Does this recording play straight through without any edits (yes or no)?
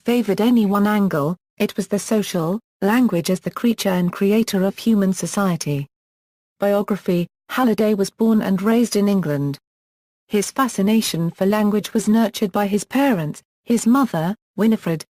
no